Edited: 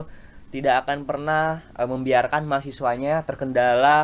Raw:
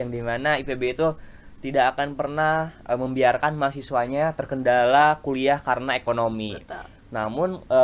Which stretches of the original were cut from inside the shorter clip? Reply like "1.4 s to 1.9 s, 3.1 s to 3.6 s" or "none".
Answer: none